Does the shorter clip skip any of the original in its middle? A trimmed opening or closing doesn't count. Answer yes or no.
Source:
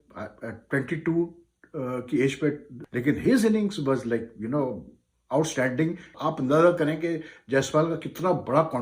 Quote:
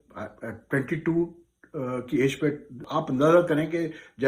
yes